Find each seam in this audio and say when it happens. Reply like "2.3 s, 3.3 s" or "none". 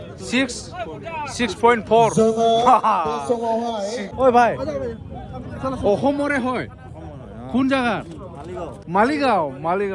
4.0 s, 8.7 s